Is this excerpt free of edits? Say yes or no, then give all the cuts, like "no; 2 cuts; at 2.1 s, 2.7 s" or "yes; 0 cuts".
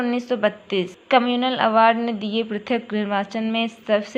yes; 0 cuts